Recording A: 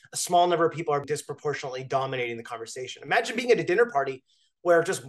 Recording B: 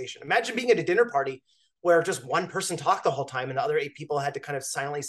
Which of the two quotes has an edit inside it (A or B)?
A